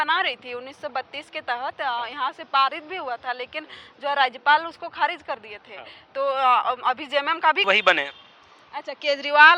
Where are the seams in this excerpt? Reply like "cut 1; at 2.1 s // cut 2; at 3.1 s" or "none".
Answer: cut 1; at 7.6 s